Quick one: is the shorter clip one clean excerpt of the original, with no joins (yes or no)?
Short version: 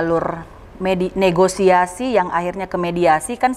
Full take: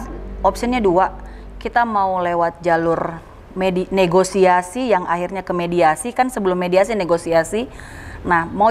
yes